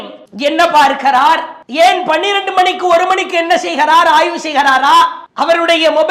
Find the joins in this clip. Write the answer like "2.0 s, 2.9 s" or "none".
none